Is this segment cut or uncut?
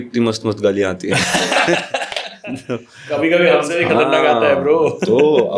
uncut